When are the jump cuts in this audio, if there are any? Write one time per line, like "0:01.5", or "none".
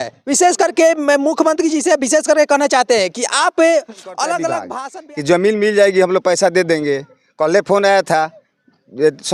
0:04.7